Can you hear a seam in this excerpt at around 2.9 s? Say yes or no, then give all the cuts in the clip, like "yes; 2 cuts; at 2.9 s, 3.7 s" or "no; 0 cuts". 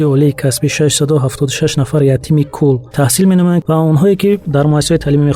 yes; 2 cuts; at 2.9 s, 3.6 s